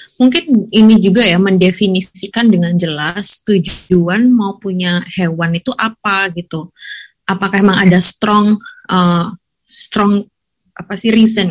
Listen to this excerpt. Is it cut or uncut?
cut